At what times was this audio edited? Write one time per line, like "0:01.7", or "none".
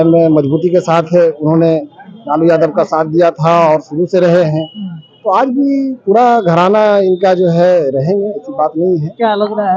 none